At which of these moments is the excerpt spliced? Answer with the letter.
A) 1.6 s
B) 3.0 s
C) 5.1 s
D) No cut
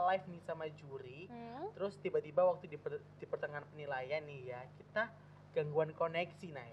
D